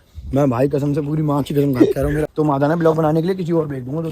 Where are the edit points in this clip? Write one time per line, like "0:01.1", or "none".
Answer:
0:02.3